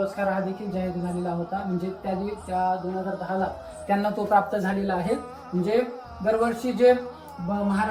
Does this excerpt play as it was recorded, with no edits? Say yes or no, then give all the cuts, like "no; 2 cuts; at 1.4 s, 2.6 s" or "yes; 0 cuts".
yes; 0 cuts